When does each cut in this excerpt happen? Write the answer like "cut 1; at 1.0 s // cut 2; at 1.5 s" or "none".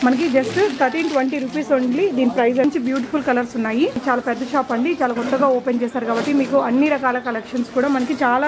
cut 1; at 2.6 s // cut 2; at 4.0 s